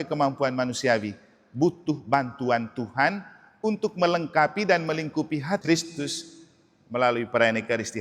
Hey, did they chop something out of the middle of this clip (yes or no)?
yes